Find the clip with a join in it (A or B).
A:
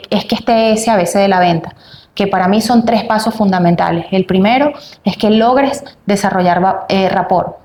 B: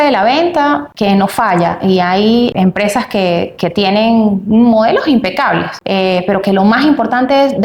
B